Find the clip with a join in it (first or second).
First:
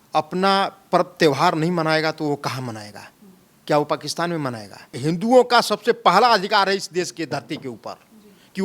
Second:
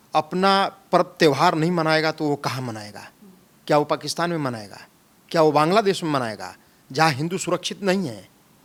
first